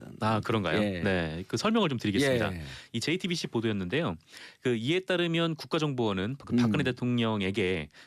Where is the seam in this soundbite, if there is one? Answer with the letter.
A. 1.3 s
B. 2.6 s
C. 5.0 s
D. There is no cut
B